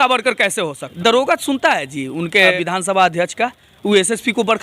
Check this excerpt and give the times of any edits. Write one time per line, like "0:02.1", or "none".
0:00.9
0:02.5